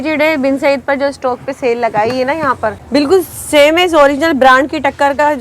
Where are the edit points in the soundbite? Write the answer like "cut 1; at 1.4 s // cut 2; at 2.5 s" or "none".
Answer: cut 1; at 2.8 s